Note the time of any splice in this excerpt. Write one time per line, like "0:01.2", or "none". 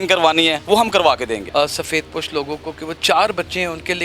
0:01.4
0:02.9